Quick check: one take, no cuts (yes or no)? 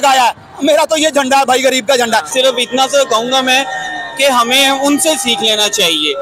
no